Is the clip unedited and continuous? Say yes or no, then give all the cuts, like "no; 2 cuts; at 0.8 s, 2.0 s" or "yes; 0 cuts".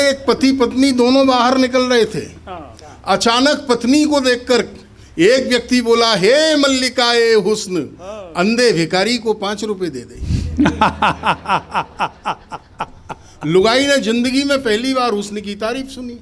yes; 0 cuts